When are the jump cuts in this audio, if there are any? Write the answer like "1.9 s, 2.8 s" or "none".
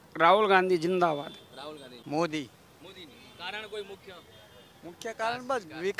1.9 s